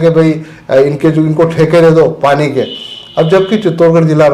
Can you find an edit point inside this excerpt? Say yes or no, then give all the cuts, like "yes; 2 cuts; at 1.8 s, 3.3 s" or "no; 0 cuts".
no; 0 cuts